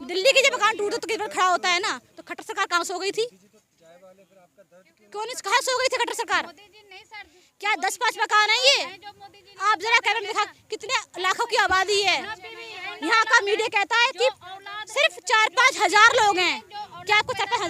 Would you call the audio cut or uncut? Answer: uncut